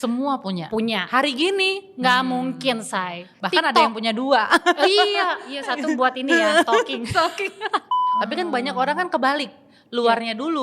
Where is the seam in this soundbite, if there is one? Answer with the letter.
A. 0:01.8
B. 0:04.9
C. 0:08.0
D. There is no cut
C